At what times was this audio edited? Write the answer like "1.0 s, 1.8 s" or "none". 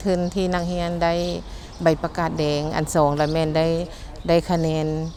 none